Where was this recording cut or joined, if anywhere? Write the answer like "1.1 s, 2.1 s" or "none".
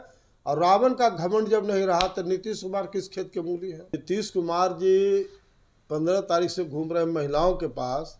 3.9 s

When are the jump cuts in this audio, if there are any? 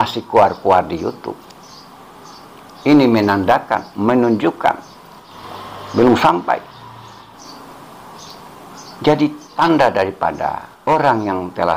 10.7 s

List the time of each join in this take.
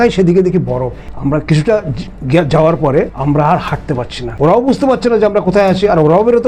1.0 s, 3.1 s, 4.2 s

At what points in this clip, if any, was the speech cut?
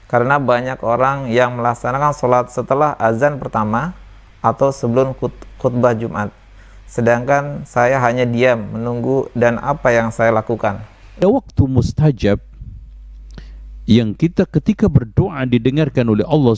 11.2 s

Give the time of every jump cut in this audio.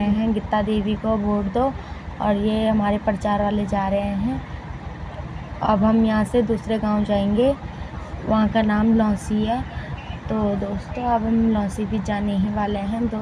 none

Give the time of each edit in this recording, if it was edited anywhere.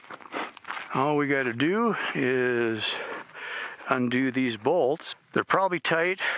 5.1 s

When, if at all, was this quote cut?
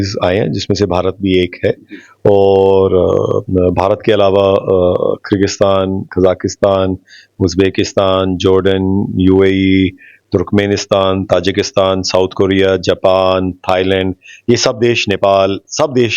none

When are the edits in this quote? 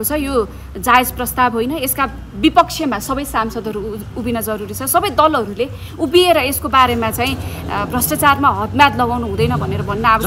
none

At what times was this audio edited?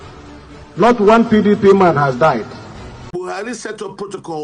3.1 s

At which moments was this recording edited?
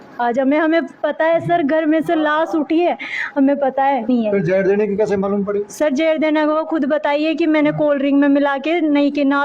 4.1 s

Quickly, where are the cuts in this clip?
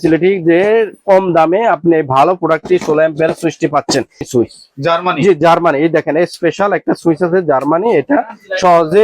4.2 s

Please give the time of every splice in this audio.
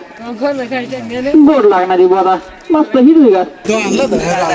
3.6 s

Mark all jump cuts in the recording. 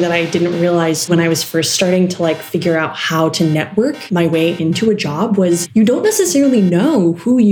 1.1 s, 4.0 s, 5.6 s

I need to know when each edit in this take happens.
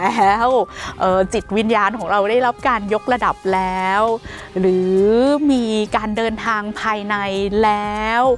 none

